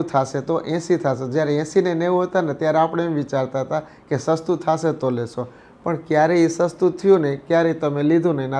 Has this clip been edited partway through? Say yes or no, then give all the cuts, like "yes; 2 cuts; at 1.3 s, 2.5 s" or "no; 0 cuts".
no; 0 cuts